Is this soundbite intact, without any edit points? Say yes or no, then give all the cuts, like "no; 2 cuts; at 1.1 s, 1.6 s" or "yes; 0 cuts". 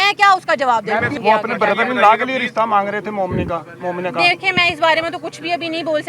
no; 1 cut; at 1.1 s